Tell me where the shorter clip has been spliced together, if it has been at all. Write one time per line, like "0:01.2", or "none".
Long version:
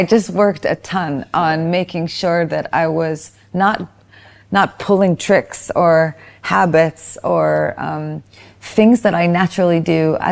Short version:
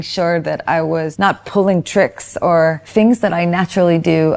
0:01.1
0:02.8